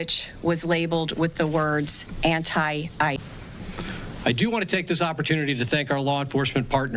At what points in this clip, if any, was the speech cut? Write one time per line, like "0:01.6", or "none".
0:03.2